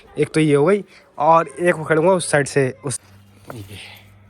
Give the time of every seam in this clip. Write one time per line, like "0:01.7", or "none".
0:02.9